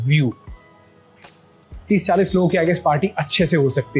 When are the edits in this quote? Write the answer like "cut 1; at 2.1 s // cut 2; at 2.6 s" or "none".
cut 1; at 1.7 s